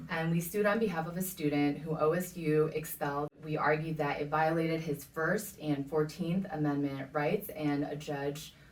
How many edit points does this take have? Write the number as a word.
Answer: one